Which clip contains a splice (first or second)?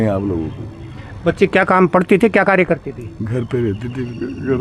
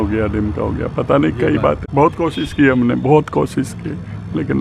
second